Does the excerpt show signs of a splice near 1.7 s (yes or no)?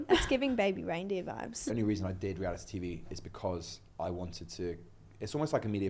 yes